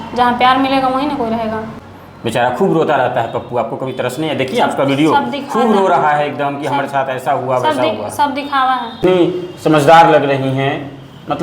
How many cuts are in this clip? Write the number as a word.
two